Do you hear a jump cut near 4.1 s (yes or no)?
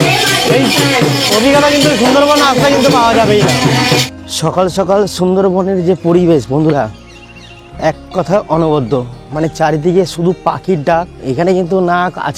yes